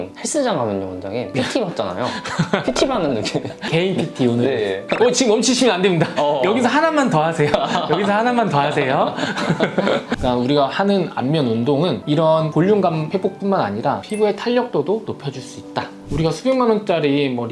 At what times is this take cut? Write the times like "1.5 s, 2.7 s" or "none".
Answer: 10.1 s, 16.1 s